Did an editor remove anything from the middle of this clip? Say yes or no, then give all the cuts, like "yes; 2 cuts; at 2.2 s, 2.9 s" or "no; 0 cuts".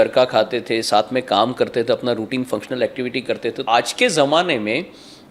yes; 1 cut; at 3.6 s